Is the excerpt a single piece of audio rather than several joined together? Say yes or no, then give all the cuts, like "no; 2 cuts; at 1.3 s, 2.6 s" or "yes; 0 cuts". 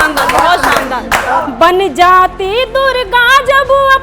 no; 1 cut; at 1.4 s